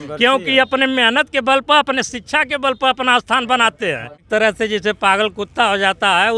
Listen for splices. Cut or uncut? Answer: cut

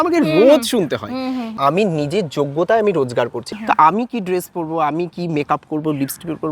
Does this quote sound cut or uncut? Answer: cut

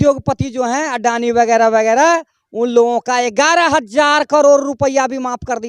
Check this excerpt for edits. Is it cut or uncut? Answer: uncut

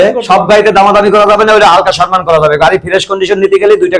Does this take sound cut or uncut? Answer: uncut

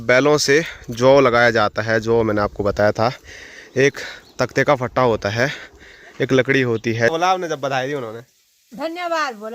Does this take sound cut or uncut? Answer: cut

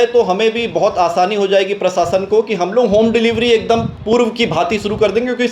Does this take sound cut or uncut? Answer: uncut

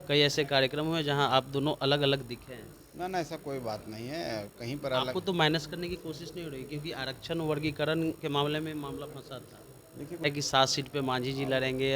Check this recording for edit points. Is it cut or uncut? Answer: cut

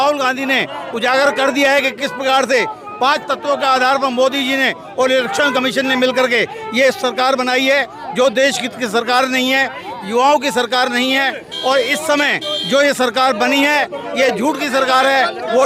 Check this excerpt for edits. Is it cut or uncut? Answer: uncut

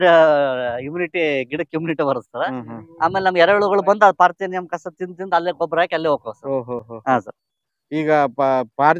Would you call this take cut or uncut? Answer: uncut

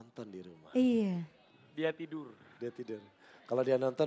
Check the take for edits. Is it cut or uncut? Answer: uncut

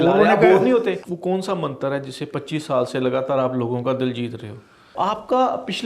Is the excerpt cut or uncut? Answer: cut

